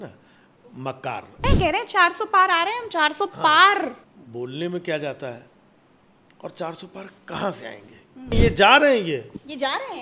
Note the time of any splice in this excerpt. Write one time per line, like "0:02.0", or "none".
0:01.4
0:04.0
0:08.4